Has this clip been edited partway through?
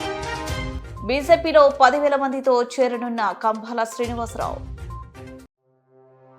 no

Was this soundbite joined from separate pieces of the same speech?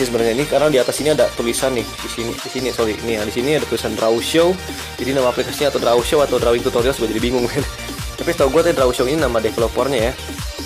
yes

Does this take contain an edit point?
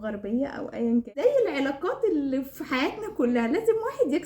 yes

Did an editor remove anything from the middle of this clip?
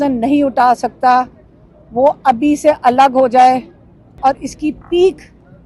yes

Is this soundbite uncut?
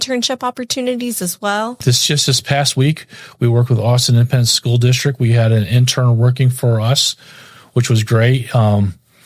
no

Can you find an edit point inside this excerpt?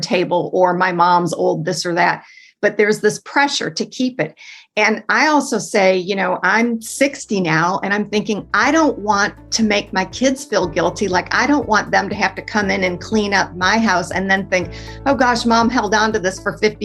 no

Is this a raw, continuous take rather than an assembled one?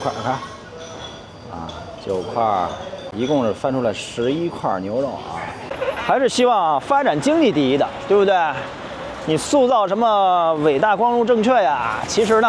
no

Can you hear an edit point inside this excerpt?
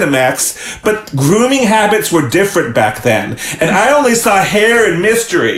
no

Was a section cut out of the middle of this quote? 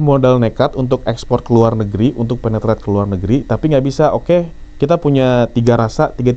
no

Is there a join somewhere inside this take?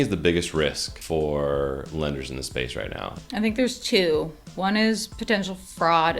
yes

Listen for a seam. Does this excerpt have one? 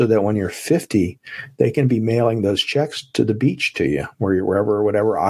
no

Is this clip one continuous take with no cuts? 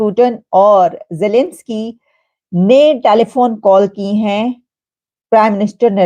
yes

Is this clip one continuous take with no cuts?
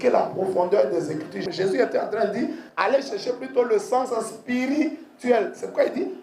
no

